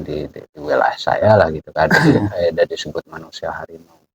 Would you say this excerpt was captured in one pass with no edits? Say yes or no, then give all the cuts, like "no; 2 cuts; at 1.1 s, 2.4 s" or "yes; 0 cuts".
yes; 0 cuts